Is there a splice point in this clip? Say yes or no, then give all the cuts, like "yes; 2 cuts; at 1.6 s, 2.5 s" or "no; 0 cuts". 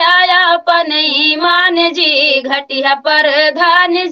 no; 0 cuts